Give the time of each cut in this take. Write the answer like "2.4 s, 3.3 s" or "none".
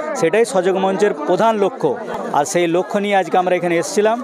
none